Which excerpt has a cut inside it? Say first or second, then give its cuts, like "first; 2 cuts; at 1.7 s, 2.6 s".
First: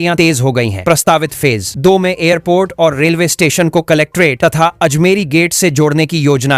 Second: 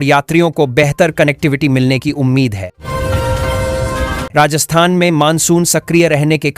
second; 2 cuts; at 2.8 s, 4.2 s